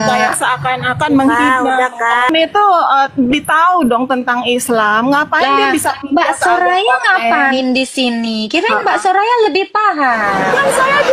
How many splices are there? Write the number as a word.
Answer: one